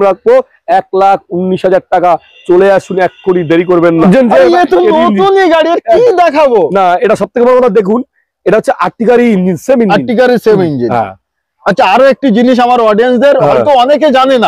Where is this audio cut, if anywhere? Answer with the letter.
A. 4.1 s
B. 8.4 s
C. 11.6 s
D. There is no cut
A